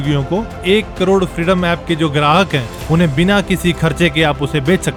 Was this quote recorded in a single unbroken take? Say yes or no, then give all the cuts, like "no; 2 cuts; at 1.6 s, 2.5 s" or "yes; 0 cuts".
yes; 0 cuts